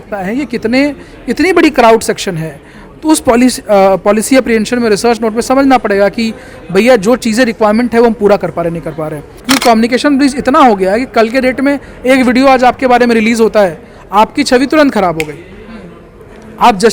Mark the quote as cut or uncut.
cut